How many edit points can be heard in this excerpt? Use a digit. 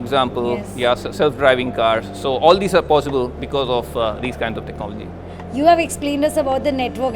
0